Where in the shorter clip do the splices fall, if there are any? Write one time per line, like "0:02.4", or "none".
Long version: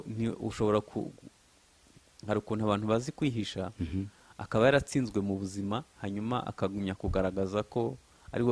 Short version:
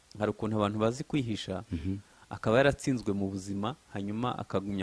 none